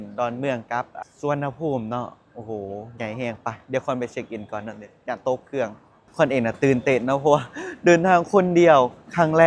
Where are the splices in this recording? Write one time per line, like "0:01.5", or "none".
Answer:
0:01.0
0:06.0